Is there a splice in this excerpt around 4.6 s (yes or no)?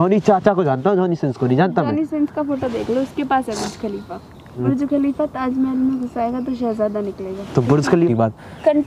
yes